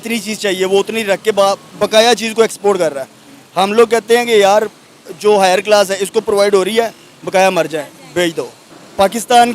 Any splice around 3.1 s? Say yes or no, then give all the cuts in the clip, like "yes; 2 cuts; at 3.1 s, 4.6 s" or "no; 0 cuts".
no; 2 cuts; at 1.7 s, 8.6 s